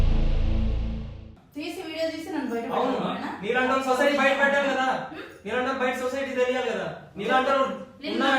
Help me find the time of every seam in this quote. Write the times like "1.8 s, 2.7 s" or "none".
1.3 s